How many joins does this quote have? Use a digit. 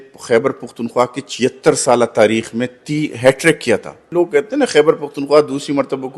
1